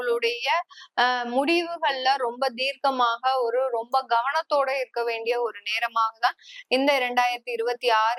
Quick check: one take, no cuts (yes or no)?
yes